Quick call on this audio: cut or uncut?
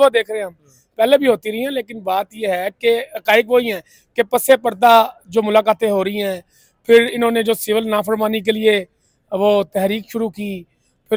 uncut